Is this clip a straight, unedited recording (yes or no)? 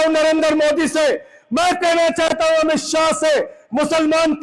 yes